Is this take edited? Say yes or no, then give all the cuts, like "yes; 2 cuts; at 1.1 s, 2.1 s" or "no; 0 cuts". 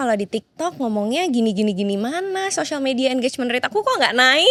no; 0 cuts